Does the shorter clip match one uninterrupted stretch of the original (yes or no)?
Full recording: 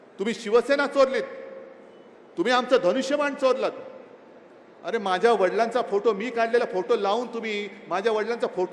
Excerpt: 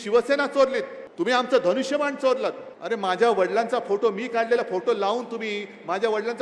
no